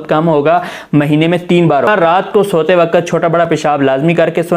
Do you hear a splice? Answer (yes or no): yes